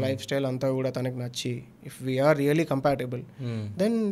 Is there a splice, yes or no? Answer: no